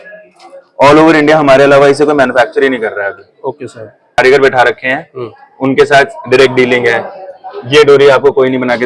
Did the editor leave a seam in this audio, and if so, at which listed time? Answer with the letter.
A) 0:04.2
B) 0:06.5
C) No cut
A